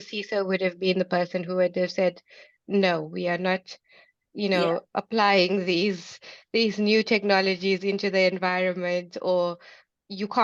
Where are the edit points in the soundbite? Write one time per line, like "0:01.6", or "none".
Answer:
none